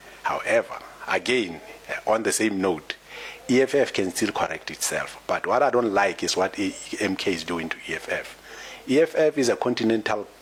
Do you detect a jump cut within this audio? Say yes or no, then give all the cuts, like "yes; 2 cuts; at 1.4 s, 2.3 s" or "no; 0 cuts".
no; 0 cuts